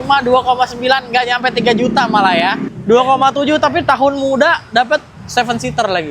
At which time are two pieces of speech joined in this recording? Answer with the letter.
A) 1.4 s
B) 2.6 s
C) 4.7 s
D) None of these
B